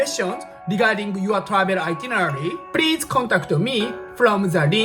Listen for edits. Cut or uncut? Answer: uncut